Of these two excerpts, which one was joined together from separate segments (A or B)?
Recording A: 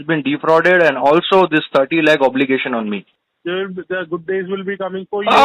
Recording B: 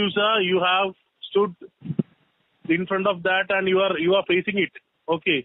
A